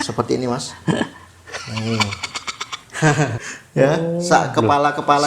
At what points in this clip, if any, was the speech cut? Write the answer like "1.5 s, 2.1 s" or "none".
3.4 s